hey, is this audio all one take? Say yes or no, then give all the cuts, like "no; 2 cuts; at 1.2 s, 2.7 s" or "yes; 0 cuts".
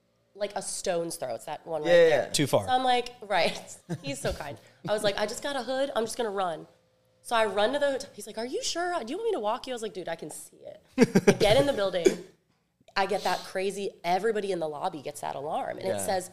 yes; 0 cuts